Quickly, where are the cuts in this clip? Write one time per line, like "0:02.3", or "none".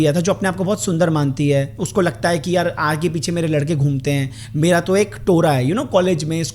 none